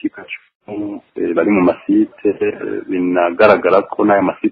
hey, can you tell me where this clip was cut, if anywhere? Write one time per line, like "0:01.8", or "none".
0:01.0